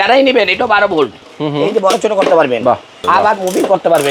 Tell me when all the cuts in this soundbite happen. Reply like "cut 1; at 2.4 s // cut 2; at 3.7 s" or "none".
cut 1; at 1.2 s // cut 2; at 3.0 s